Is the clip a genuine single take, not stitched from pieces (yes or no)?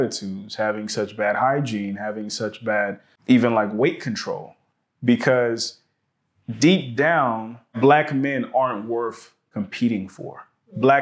no